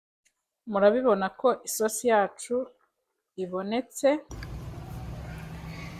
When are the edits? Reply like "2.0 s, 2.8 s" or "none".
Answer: 4.3 s